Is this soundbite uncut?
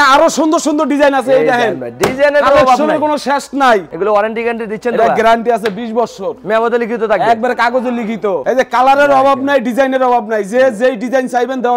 no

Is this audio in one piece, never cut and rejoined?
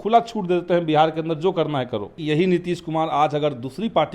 no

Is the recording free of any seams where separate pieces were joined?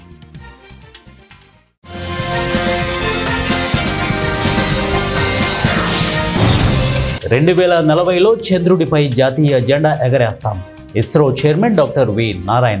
yes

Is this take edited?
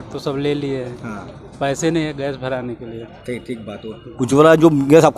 no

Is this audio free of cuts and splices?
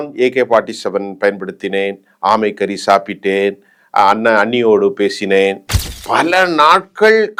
yes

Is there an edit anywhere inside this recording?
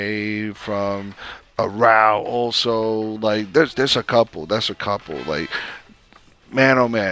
no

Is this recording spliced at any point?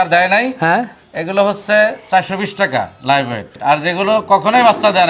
yes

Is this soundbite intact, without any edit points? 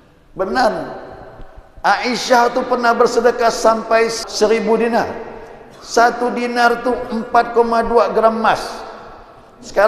no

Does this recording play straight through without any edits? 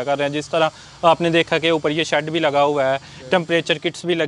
yes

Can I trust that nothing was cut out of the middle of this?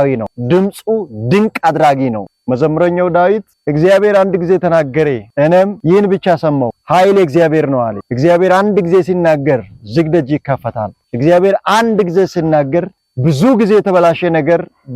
yes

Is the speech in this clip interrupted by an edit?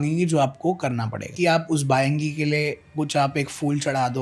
yes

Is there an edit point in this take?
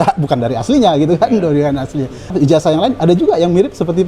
yes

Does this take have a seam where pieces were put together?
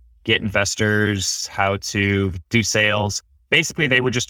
yes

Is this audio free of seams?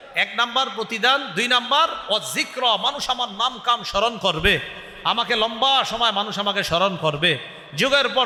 yes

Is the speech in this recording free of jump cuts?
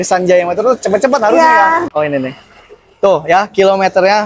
no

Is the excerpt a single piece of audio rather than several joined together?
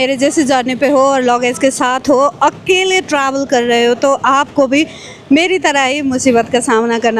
yes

